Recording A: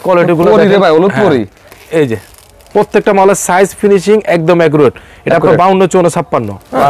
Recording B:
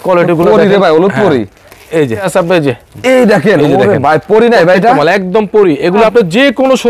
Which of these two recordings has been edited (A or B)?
B